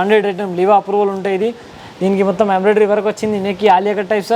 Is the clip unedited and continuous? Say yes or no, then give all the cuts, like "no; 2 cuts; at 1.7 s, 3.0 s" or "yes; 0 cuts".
yes; 0 cuts